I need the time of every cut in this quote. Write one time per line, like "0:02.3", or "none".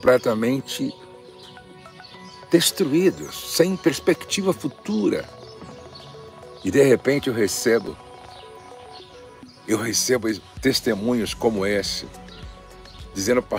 none